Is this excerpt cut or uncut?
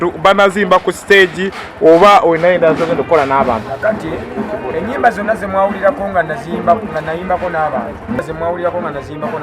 cut